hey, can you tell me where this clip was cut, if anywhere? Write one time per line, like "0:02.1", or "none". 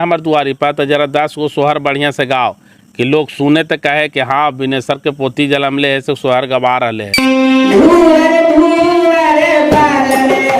0:07.0